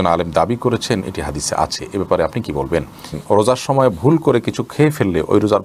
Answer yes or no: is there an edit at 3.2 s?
yes